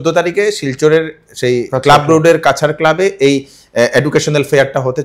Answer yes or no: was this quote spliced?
no